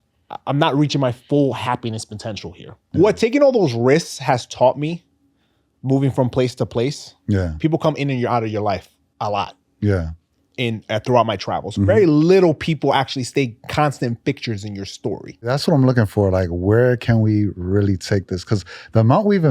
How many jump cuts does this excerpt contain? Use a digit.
2